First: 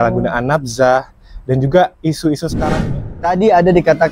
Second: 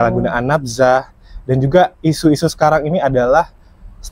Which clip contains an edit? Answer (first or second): first